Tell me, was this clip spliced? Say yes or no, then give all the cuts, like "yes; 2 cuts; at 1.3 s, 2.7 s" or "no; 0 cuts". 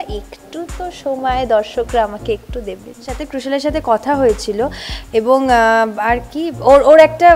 yes; 1 cut; at 3.3 s